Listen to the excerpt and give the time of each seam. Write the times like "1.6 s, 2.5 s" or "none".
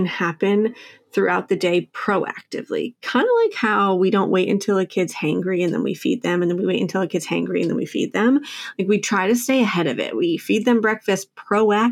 none